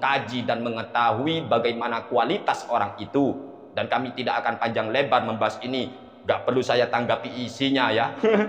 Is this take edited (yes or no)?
no